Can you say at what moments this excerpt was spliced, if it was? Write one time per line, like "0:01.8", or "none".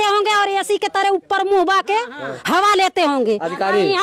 none

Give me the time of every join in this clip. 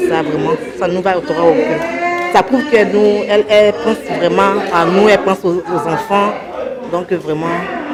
none

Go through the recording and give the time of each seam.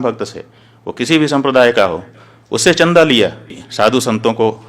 0:03.6

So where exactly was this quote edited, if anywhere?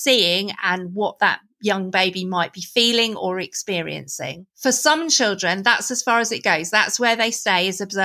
none

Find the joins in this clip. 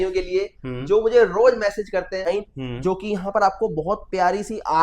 0:02.3

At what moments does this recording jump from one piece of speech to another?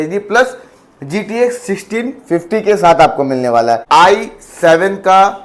0:03.8

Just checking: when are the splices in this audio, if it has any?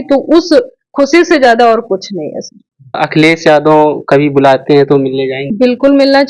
0:03.0
0:05.4

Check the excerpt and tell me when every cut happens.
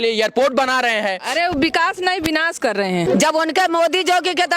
0:03.1

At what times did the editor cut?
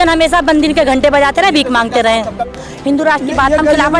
0:02.5

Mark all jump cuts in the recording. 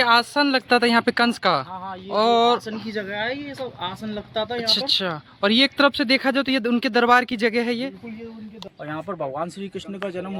none

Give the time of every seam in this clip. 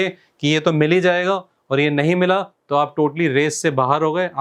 none

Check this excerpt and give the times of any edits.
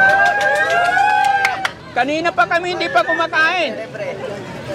0:01.8

